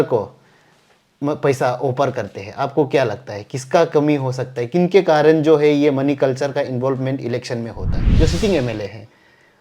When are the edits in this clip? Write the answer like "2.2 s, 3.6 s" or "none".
8.0 s